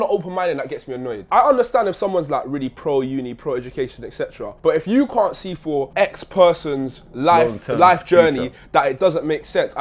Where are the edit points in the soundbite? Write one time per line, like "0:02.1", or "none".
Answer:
0:01.2
0:04.5
0:05.9